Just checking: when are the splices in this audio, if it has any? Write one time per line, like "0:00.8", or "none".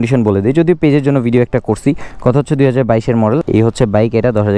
0:03.4